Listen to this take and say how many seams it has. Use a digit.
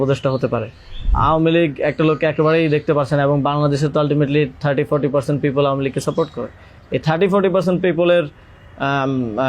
1